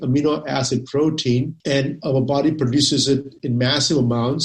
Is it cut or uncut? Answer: cut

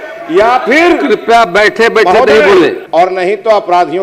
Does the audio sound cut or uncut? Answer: cut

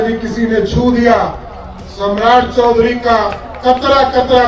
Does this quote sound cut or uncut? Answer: uncut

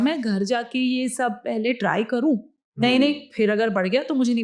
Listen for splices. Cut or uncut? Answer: uncut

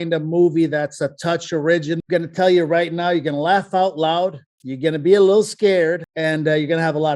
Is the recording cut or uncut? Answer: cut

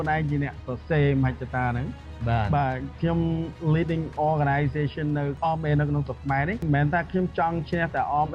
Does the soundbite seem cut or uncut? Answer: cut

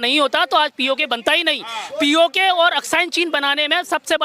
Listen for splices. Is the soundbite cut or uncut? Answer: uncut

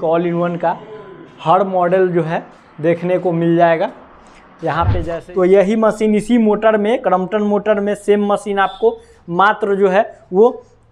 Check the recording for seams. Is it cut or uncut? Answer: cut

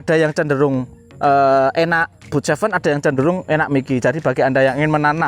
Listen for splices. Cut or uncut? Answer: cut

